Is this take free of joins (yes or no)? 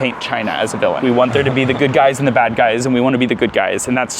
no